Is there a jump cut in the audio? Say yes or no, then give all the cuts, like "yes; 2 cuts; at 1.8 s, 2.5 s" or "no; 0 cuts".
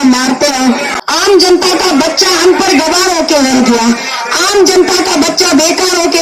yes; 1 cut; at 0.9 s